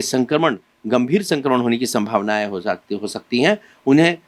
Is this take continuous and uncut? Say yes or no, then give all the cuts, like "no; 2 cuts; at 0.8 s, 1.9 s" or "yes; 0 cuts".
yes; 0 cuts